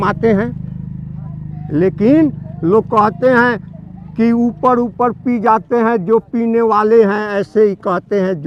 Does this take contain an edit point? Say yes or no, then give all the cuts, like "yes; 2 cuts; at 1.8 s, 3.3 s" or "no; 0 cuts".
no; 0 cuts